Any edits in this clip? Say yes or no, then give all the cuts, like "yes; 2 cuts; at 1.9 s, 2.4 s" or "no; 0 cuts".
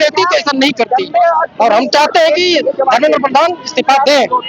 no; 0 cuts